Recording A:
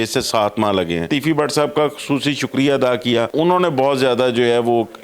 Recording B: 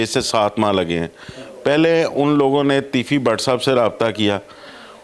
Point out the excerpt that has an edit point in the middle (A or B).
A